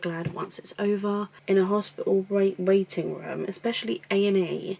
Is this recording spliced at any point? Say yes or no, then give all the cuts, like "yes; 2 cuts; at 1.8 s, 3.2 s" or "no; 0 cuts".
yes; 1 cut; at 1.3 s